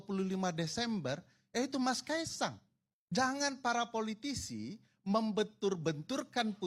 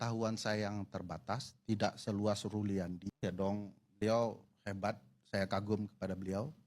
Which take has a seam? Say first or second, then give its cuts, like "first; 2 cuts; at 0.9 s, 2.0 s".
second; 1 cut; at 3.1 s